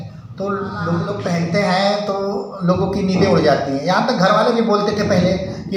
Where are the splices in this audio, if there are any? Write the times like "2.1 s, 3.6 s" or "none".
1.2 s